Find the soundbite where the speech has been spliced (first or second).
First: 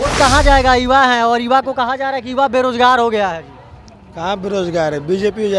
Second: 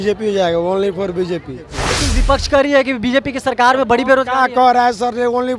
second